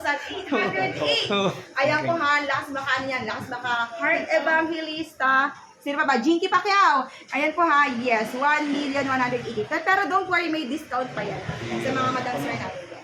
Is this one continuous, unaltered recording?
yes; 0 cuts

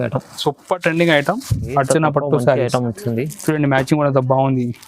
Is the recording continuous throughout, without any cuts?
no; 1 cut; at 1.6 s

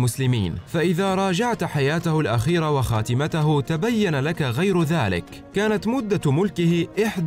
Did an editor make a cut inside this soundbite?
yes; 1 cut; at 5.4 s

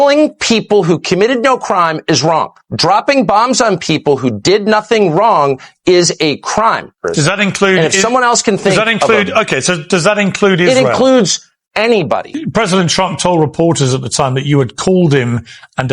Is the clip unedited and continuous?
no; 3 cuts; at 2.6 s, 7.1 s, 12.3 s

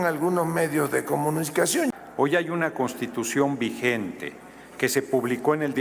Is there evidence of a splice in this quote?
yes; 1 cut; at 1.9 s

